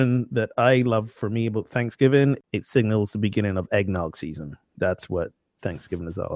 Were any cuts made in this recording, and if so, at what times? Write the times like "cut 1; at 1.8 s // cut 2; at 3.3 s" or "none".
cut 1; at 2.4 s